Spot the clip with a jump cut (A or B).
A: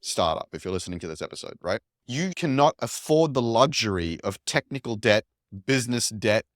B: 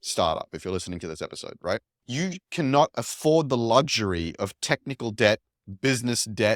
A